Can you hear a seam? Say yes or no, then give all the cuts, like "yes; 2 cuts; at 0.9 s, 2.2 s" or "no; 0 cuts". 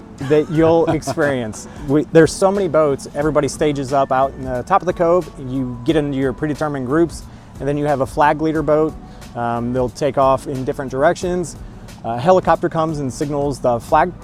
no; 0 cuts